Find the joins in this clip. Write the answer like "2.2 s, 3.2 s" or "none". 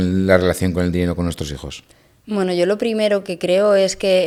none

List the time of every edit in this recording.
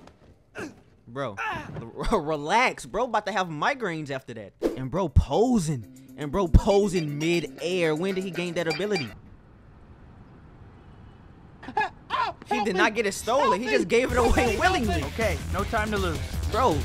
4.5 s, 9.1 s

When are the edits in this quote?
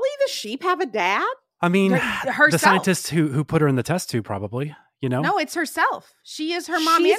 1.5 s

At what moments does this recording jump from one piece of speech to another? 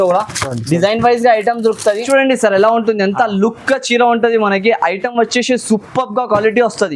2.0 s

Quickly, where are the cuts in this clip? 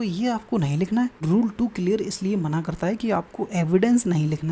1.2 s

